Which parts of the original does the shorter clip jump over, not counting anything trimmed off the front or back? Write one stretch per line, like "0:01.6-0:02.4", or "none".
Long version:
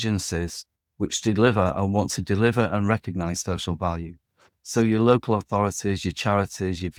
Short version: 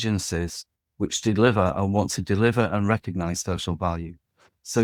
none